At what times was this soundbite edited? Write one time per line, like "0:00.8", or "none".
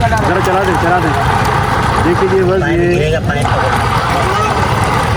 none